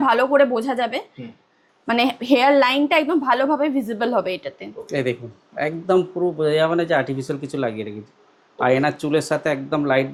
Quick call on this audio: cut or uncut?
uncut